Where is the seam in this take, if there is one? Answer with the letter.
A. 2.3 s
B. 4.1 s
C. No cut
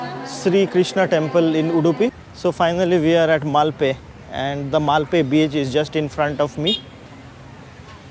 A